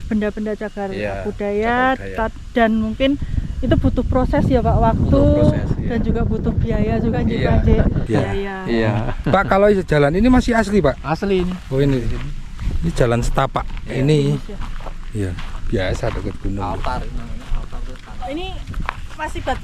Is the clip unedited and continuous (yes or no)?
no